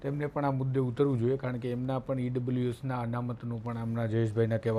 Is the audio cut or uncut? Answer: uncut